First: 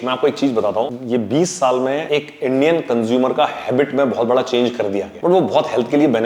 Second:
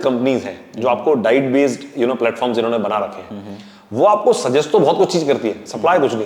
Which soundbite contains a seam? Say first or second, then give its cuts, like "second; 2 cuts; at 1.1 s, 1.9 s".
first; 3 cuts; at 1.0 s, 2.0 s, 5.1 s